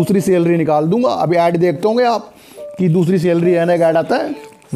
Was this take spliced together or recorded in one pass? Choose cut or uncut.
uncut